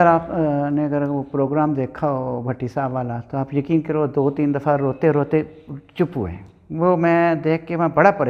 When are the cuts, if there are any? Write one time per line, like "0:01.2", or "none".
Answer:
none

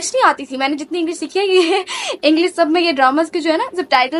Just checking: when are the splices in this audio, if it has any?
none

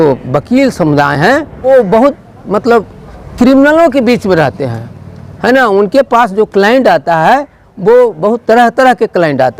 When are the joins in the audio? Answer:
0:01.7

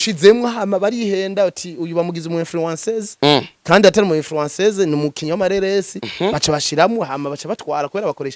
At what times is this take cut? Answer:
none

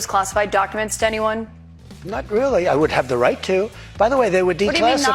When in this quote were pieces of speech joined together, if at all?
0:03.8

